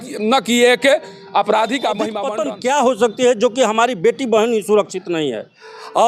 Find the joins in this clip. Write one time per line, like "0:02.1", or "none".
0:02.2